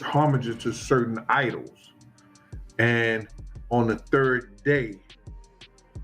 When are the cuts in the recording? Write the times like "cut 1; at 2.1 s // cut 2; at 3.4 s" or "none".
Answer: cut 1; at 5.1 s

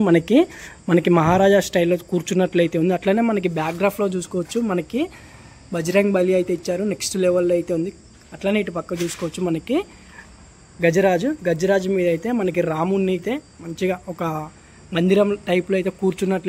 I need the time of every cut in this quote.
none

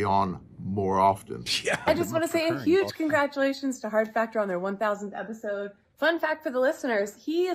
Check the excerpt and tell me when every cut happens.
cut 1; at 1.9 s

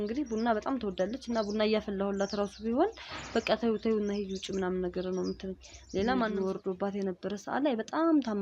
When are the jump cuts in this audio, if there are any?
cut 1; at 6.3 s

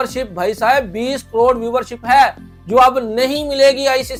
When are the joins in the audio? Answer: none

